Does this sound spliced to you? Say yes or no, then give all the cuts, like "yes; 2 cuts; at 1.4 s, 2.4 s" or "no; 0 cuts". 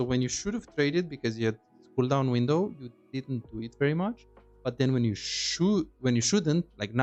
no; 0 cuts